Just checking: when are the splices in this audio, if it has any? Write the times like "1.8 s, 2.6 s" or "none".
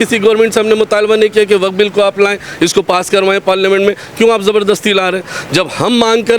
none

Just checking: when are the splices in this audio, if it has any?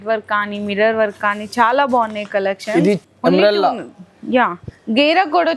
3.0 s

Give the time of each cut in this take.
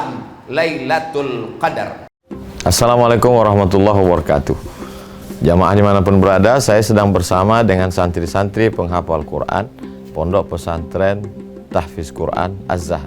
2.1 s

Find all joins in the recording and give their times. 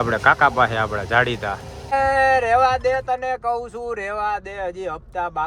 1.8 s

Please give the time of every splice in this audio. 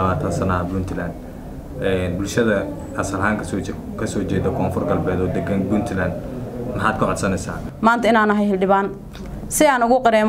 7.6 s

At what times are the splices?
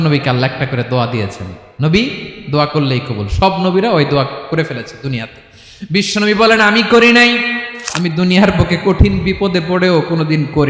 7.7 s

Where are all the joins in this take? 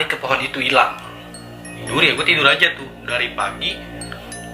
1.8 s

